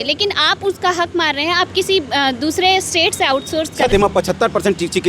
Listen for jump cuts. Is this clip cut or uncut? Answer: cut